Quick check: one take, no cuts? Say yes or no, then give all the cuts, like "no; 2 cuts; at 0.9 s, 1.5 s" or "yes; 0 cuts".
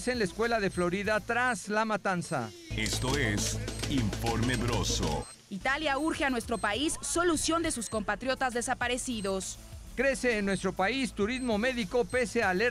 no; 3 cuts; at 2.6 s, 5.2 s, 9.8 s